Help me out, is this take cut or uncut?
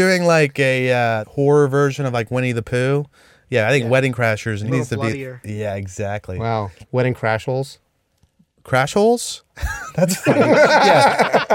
cut